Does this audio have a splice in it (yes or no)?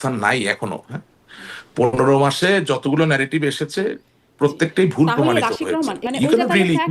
yes